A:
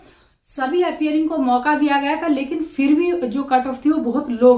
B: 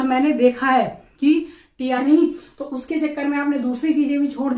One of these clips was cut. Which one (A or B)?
B